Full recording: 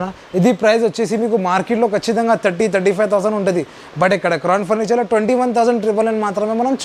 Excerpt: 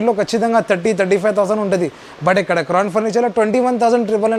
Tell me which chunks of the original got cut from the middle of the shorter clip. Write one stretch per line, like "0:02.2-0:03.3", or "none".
none